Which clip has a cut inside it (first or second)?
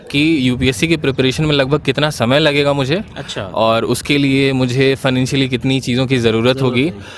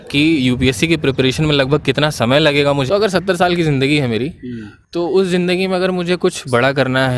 second